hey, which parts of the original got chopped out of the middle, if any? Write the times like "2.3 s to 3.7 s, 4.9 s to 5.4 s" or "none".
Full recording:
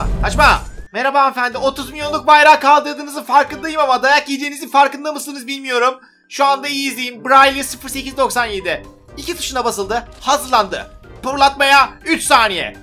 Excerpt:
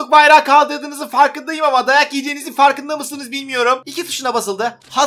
6.1 s to 9.3 s